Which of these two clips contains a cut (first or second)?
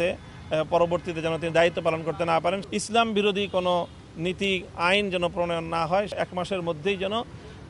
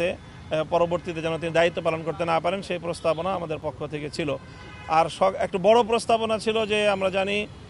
first